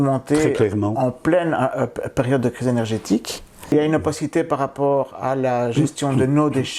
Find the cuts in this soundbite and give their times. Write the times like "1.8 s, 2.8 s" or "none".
3.7 s